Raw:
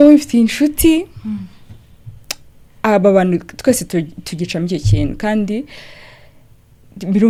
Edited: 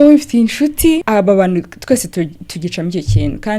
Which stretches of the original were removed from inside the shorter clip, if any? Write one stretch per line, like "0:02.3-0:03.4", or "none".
0:01.0-0:02.8